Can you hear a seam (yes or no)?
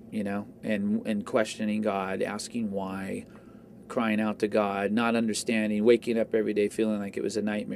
no